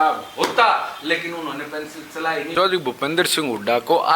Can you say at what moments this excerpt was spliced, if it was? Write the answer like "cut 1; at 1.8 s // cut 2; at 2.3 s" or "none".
cut 1; at 2.5 s